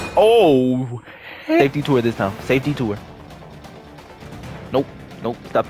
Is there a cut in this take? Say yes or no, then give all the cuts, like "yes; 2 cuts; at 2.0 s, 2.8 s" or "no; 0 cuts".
yes; 1 cut; at 1.6 s